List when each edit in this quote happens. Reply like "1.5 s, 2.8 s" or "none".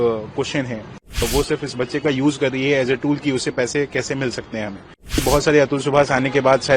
1.2 s, 5.2 s